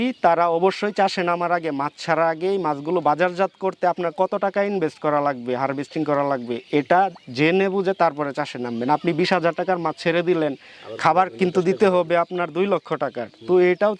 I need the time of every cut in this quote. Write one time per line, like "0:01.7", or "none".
none